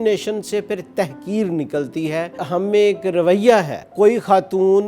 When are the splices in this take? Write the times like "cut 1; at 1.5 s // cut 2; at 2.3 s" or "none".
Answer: cut 1; at 2.4 s // cut 2; at 3.9 s